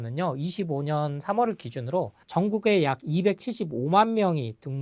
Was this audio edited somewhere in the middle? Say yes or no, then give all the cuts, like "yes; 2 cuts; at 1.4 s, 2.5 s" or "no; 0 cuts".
yes; 1 cut; at 2.2 s